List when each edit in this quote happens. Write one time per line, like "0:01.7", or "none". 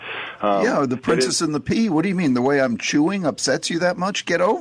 none